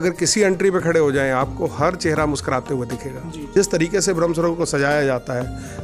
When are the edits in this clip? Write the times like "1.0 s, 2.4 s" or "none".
3.5 s